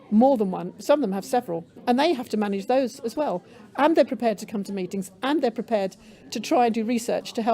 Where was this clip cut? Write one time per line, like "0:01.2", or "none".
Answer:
0:01.8